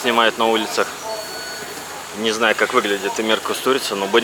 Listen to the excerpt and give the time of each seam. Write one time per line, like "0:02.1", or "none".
none

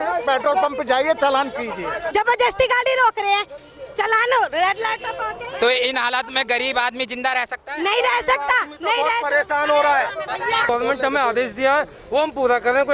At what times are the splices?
0:02.1
0:10.7

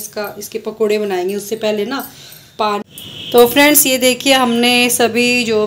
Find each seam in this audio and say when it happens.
0:02.8

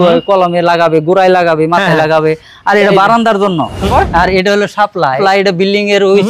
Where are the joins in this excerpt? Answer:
0:04.0
0:05.2

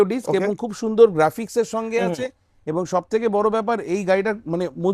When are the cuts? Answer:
none

